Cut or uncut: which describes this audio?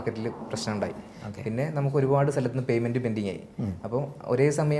uncut